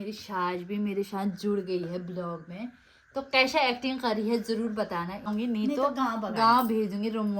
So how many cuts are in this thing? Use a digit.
1